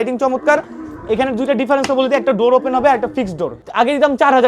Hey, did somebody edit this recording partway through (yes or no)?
yes